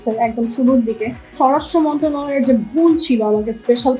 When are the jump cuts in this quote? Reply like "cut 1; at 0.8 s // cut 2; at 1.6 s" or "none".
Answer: cut 1; at 1.3 s